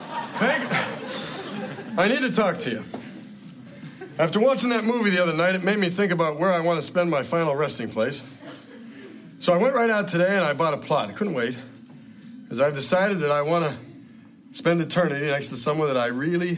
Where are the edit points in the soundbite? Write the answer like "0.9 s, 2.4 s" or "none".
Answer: none